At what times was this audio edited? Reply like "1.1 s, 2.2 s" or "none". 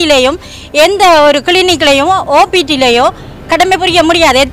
none